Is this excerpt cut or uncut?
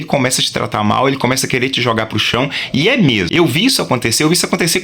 cut